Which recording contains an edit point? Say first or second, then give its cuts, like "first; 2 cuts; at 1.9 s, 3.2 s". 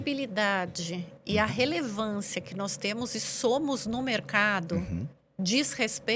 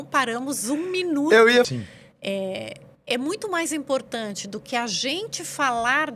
second; 1 cut; at 1.7 s